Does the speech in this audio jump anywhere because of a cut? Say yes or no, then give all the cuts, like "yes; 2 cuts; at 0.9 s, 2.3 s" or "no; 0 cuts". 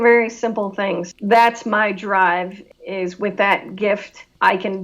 yes; 1 cut; at 1.1 s